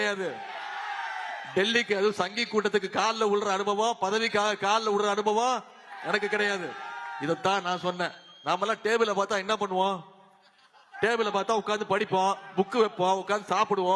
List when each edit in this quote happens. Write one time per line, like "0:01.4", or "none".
none